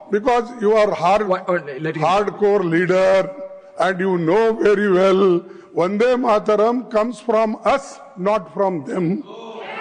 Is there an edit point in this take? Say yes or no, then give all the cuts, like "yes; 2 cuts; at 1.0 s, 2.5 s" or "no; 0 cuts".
no; 0 cuts